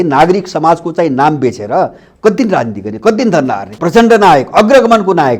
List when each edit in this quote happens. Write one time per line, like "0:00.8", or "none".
0:03.7